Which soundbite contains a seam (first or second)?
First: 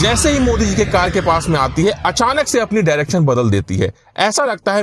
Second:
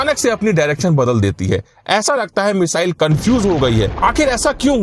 second